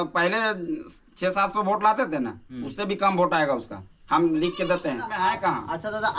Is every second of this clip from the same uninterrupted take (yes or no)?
no